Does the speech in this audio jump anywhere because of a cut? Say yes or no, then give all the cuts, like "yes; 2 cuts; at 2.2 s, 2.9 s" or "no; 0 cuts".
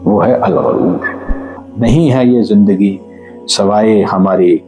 yes; 1 cut; at 1.6 s